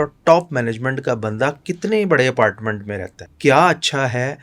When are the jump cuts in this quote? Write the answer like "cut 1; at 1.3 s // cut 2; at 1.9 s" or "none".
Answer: cut 1; at 3.3 s